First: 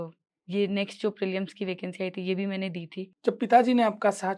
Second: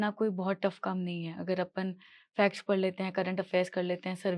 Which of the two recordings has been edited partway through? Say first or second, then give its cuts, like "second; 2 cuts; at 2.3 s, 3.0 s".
first; 1 cut; at 3.1 s